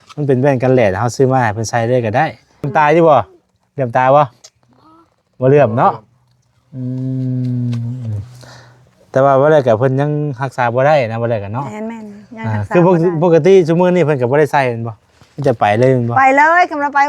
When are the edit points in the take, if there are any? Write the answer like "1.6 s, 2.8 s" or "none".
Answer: 2.7 s